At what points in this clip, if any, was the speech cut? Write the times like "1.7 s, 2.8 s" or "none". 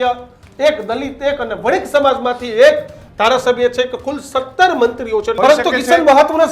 5.4 s

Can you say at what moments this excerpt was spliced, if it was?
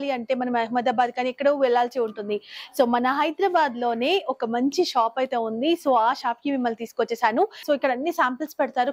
7.6 s

